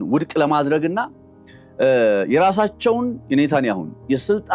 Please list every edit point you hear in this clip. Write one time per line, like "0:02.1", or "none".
none